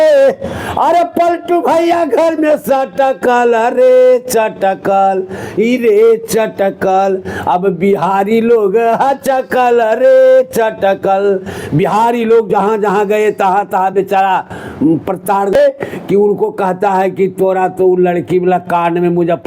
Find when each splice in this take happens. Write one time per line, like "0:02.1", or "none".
0:15.5